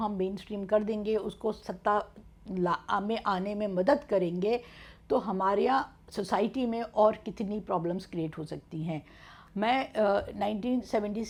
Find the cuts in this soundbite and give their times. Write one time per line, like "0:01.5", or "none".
none